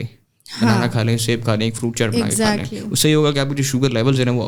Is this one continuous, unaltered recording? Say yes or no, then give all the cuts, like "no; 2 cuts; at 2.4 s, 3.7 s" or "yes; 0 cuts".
yes; 0 cuts